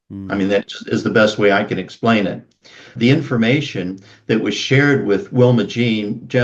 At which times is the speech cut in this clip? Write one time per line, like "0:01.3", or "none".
0:02.9